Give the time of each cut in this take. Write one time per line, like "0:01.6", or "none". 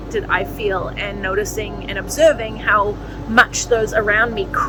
none